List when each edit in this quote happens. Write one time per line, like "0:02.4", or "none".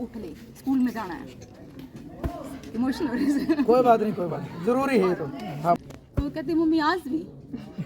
0:05.8